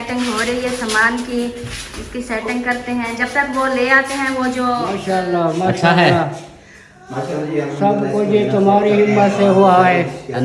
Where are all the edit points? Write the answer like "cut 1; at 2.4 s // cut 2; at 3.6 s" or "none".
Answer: cut 1; at 5.0 s